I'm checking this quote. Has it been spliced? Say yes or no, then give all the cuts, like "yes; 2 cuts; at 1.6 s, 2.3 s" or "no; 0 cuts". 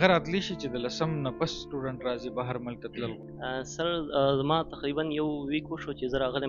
yes; 1 cut; at 3.1 s